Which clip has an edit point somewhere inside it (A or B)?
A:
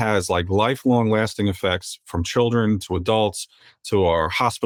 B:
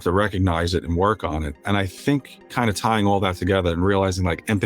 B